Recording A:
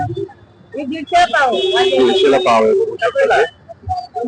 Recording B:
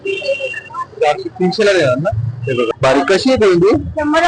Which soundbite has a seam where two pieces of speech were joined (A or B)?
B